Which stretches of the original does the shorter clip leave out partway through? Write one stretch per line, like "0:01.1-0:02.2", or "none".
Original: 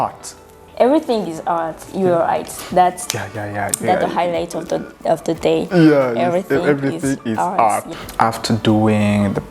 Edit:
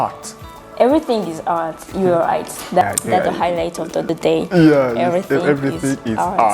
0:02.8-0:03.6
0:04.8-0:05.3